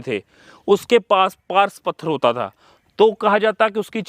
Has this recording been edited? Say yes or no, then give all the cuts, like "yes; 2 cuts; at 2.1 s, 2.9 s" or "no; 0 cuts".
no; 0 cuts